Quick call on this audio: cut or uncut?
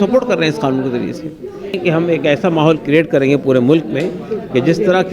cut